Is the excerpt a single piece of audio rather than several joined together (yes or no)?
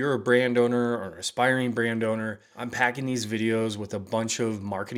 yes